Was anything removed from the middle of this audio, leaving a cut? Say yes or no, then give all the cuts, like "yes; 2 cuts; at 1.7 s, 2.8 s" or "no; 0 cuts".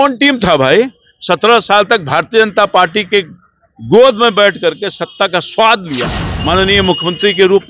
yes; 1 cut; at 6.2 s